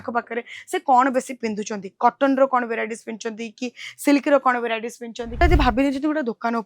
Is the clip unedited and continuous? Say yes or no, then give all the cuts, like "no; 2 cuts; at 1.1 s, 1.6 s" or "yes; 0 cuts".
no; 1 cut; at 5.2 s